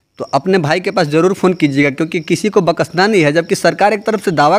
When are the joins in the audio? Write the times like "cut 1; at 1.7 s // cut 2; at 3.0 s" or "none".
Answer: none